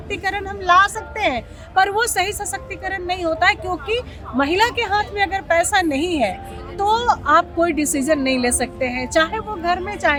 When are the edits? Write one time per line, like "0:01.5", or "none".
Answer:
none